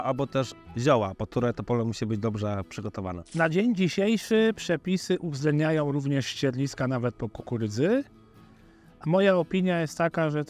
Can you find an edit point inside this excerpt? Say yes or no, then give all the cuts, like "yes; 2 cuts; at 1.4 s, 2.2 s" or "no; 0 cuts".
yes; 1 cut; at 3.2 s